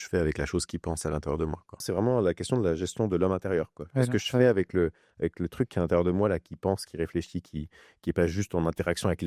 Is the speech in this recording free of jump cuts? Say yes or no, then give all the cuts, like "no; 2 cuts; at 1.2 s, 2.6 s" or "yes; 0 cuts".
no; 1 cut; at 1.8 s